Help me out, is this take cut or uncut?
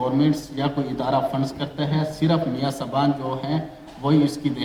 uncut